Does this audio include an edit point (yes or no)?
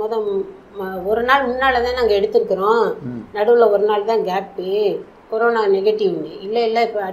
no